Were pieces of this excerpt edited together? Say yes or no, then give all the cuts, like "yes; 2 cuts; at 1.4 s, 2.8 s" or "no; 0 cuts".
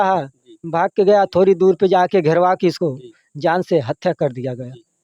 no; 0 cuts